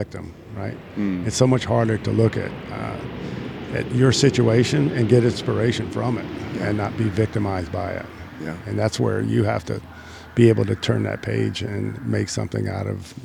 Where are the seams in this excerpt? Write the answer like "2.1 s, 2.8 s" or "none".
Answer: none